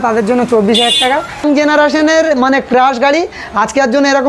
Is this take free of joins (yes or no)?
no